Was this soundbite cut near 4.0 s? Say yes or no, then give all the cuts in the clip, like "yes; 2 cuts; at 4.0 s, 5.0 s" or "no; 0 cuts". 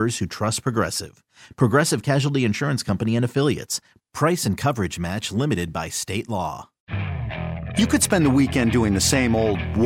no; 1 cut; at 6.8 s